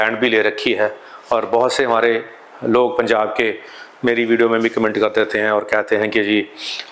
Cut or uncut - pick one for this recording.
uncut